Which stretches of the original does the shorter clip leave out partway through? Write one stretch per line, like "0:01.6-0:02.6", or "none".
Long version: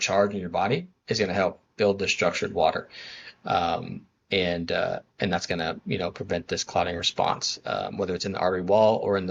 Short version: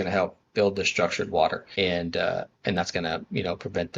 0:02.9-0:04.2